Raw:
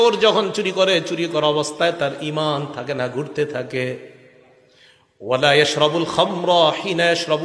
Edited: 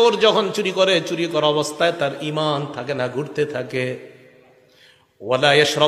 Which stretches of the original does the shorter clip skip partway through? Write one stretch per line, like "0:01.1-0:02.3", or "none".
none